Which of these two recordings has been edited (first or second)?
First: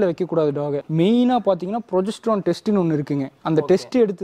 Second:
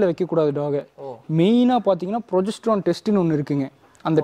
first